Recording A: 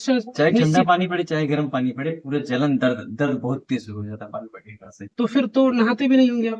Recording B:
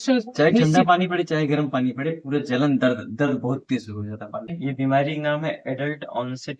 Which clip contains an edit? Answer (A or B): B